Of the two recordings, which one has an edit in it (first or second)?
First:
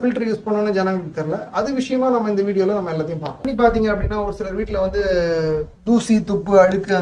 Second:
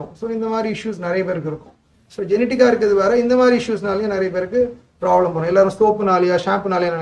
first